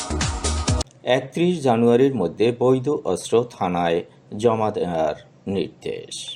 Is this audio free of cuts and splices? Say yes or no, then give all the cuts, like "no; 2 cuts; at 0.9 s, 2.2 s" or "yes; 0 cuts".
no; 1 cut; at 0.9 s